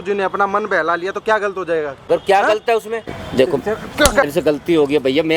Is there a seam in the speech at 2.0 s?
yes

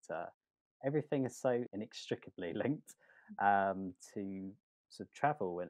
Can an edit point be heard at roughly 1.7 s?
yes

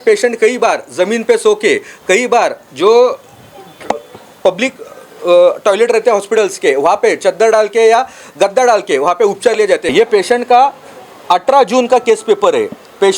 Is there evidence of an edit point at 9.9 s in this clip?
yes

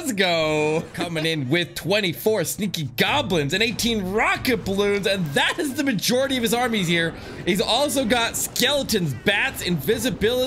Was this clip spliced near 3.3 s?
no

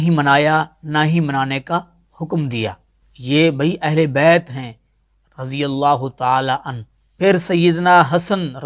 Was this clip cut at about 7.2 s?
yes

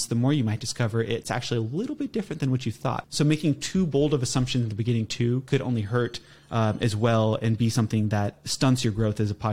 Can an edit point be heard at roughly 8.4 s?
yes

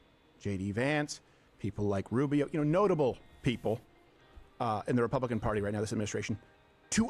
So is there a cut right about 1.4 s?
no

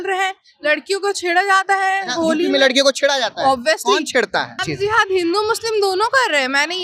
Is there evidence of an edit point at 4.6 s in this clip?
yes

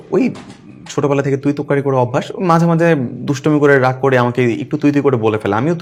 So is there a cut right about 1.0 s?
no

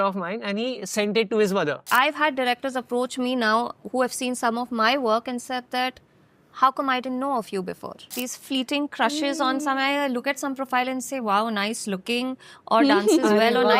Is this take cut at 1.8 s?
yes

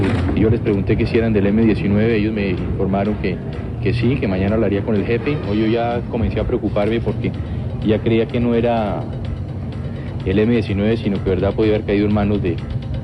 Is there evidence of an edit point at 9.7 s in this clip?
yes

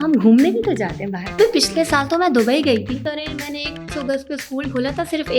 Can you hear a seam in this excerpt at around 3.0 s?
yes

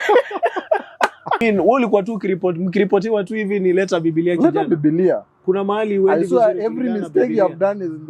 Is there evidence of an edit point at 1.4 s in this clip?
yes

